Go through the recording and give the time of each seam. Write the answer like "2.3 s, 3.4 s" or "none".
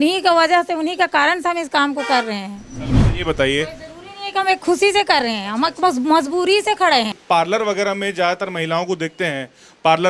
7.2 s